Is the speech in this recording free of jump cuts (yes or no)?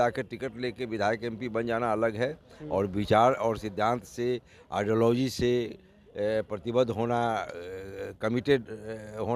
yes